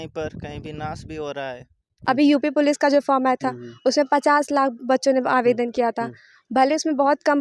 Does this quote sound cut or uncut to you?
cut